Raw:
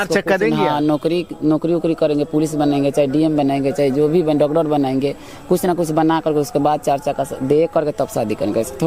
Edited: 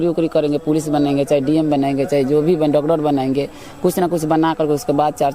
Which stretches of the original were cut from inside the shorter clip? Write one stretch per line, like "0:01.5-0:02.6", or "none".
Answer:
none